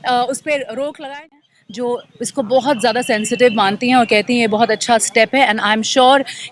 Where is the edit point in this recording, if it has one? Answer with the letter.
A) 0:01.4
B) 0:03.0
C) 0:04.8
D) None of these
A